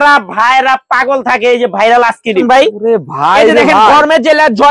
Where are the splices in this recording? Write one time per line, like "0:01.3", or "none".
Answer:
0:02.4